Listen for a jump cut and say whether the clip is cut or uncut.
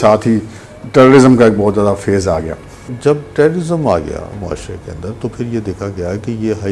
cut